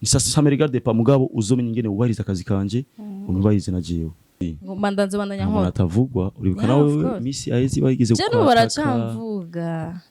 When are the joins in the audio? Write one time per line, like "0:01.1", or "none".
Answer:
0:04.4